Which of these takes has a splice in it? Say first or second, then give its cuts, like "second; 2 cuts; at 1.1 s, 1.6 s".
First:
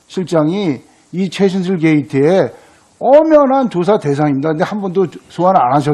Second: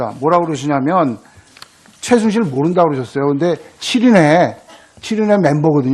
second; 1 cut; at 1.3 s